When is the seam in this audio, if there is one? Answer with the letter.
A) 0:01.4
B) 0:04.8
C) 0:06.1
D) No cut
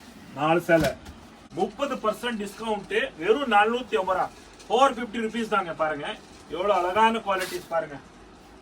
A